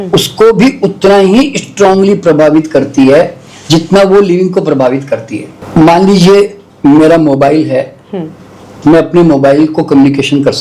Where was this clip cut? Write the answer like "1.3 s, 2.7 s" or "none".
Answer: 5.5 s

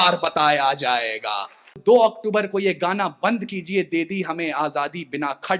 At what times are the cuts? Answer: 1.7 s

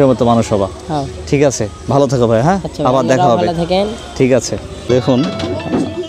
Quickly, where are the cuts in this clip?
4.7 s

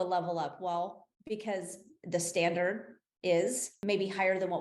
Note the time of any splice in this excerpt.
1.1 s, 3.7 s

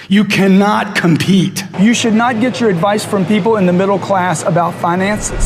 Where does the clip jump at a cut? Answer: 1.7 s

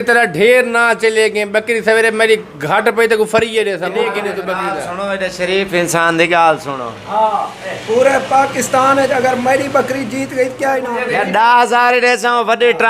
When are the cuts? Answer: 3.9 s, 10.9 s

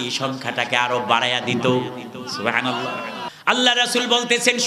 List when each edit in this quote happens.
3.3 s

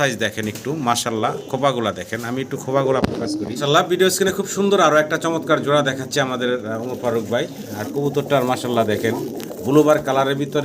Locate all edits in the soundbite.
3.6 s

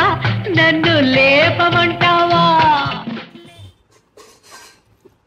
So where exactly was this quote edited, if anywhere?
3.7 s

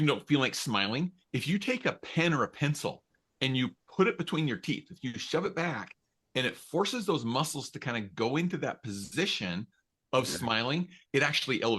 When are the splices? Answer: none

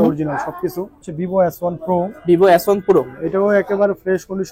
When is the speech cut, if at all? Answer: 1.0 s

